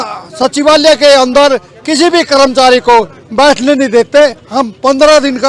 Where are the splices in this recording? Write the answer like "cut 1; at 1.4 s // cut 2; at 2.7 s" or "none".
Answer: none